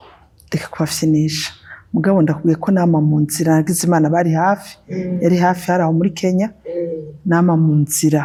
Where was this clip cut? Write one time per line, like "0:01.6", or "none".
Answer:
none